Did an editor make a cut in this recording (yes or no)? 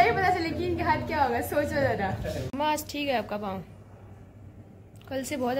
yes